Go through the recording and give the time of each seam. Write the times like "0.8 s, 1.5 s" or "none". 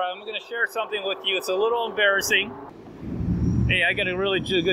2.6 s